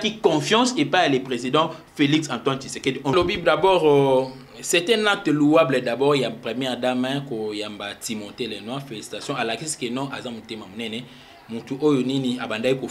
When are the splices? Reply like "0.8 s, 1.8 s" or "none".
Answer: 3.1 s